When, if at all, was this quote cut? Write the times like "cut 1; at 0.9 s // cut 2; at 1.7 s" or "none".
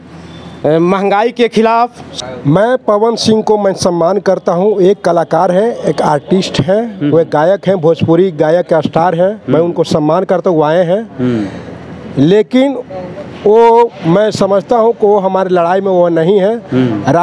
cut 1; at 2.1 s